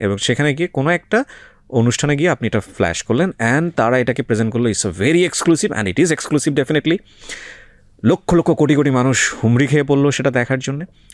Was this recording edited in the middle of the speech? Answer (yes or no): no